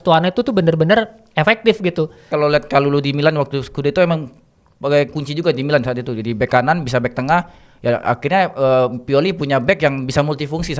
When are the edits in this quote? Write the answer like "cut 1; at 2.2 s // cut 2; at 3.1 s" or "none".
cut 1; at 2.3 s